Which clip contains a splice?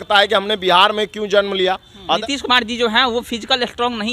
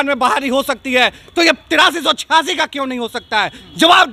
first; 1 cut; at 2.1 s

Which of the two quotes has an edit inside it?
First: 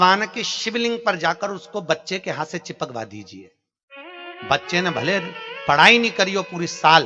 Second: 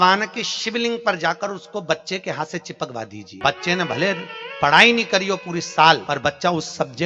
second; 2 cuts; at 3.3 s, 6.0 s

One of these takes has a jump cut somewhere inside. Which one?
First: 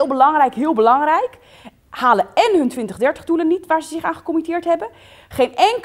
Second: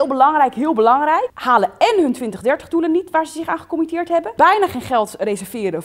second; 2 cuts; at 1.3 s, 4.3 s

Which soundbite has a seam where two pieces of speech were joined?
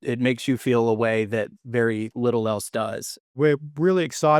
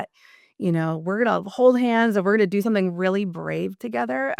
first; 1 cut; at 3.3 s

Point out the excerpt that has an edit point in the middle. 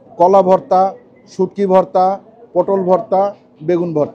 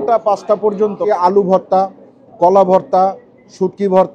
second; 1 cut; at 1.0 s

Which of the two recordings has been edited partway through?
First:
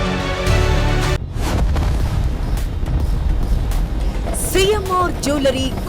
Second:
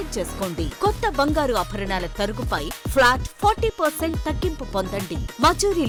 first; 1 cut; at 1.2 s

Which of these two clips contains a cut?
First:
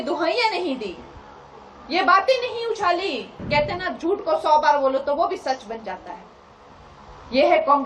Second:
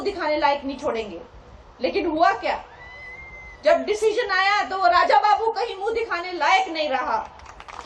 first; 1 cut; at 3.4 s

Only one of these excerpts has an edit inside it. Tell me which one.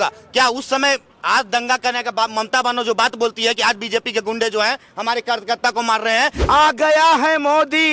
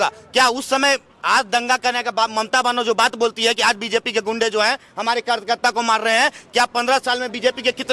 first; 1 cut; at 6.4 s

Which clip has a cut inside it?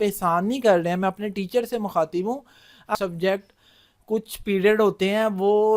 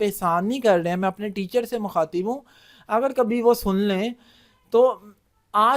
first; 1 cut; at 2.9 s

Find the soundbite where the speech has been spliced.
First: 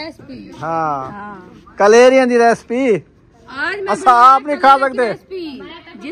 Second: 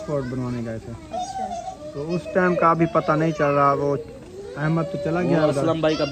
second; 1 cut; at 1.9 s

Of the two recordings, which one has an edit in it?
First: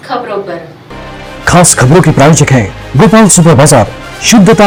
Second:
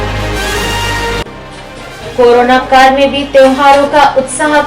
second; 1 cut; at 1.2 s

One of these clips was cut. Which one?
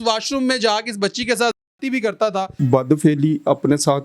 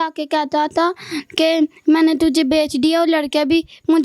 first; 1 cut; at 2.5 s

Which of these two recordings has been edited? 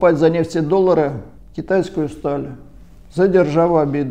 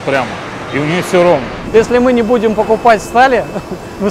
second; 1 cut; at 1.6 s

